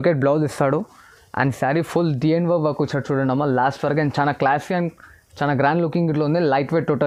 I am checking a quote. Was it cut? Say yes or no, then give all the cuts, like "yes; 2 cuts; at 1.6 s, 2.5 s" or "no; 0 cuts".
no; 0 cuts